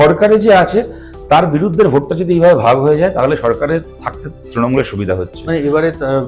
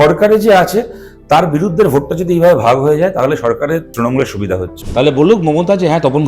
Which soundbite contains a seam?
second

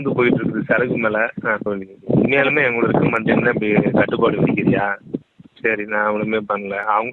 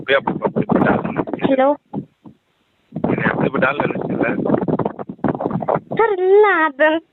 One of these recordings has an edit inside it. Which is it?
first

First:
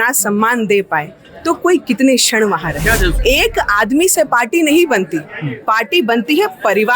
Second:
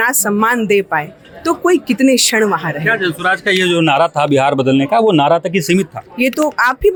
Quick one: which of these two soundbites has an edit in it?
first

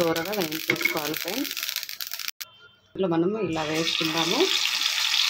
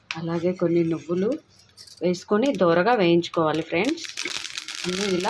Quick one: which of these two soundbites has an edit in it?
first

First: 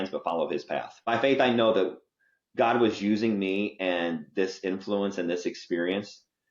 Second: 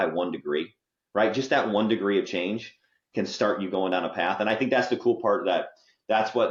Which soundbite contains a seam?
first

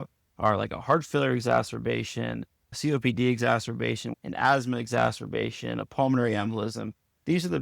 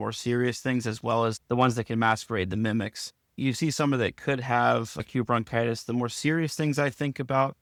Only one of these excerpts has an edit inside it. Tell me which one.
first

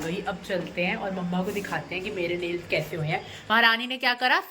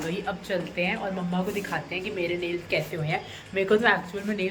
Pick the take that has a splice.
first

